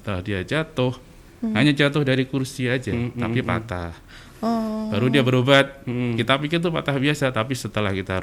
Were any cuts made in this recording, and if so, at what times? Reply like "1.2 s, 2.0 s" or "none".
none